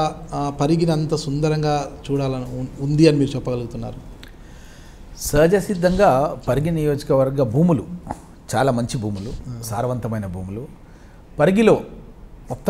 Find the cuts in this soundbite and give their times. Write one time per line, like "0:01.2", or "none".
none